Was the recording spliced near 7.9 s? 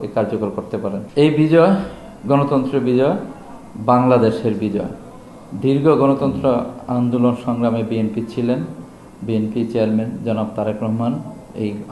no; 1 cut; at 1.0 s

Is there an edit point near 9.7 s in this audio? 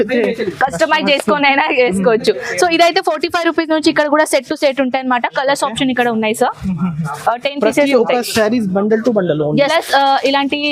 yes; 1 cut; at 9.7 s

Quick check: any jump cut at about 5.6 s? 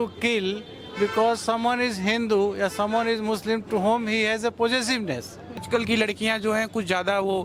yes; 1 cut; at 5.6 s

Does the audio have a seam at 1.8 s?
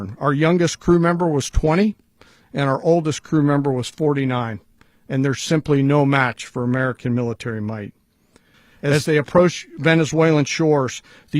no; 1 cut; at 8.9 s

